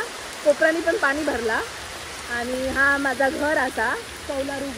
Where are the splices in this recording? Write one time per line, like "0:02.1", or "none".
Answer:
none